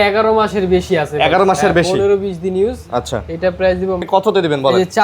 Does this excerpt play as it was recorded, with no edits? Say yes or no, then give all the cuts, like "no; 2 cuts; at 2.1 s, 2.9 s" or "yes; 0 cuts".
no; 1 cut; at 4.0 s